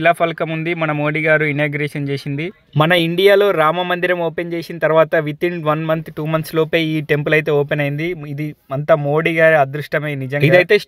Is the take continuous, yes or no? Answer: yes